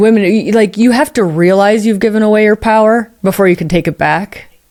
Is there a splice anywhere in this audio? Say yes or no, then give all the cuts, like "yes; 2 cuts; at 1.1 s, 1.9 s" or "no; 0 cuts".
no; 0 cuts